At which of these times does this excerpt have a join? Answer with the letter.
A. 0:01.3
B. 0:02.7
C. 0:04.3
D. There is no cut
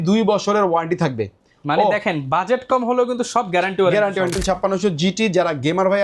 C